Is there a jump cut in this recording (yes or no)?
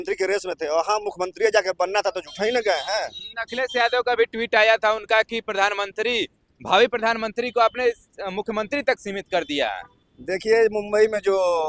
no